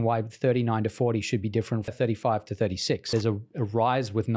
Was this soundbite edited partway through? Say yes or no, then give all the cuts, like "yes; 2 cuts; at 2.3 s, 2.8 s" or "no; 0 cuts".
yes; 2 cuts; at 1.9 s, 3.0 s